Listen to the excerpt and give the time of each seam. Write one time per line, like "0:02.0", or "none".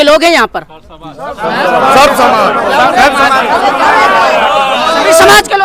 none